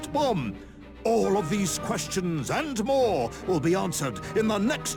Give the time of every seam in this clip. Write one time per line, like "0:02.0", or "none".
none